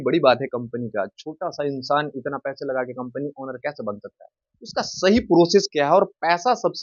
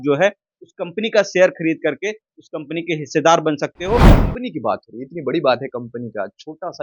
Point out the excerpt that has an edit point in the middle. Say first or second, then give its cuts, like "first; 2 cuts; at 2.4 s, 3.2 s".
second; 1 cut; at 4.2 s